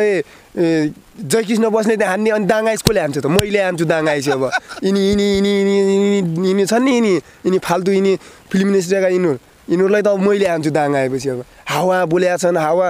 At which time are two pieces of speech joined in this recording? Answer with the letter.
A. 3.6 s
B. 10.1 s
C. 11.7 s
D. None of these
D